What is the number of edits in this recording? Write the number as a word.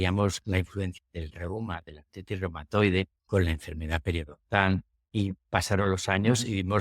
two